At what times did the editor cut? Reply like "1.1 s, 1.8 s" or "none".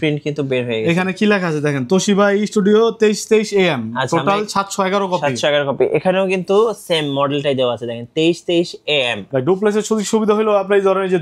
9.3 s